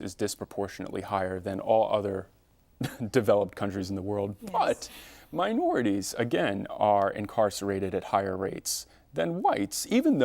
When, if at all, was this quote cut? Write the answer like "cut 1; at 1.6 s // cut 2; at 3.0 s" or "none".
cut 1; at 4.5 s